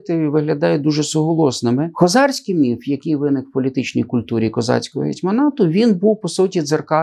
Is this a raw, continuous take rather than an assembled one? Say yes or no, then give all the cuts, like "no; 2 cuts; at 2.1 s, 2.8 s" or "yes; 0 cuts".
no; 1 cut; at 1.9 s